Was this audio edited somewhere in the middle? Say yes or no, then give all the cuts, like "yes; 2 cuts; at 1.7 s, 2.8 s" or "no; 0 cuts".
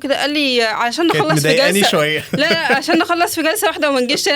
no; 0 cuts